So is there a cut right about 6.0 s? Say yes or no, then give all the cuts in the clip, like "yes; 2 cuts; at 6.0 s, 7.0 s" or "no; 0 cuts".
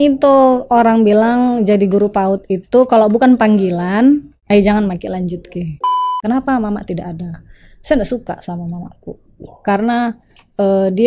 yes; 2 cuts; at 4.3 s, 6.0 s